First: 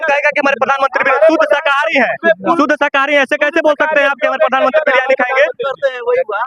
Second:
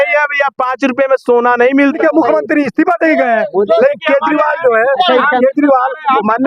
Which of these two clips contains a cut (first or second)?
second